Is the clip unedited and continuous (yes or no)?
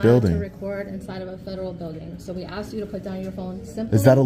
yes